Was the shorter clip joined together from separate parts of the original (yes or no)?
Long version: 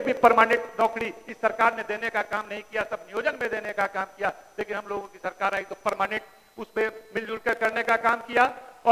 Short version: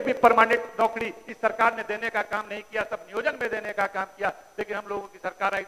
no